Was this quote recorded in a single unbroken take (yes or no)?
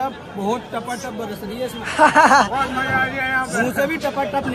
yes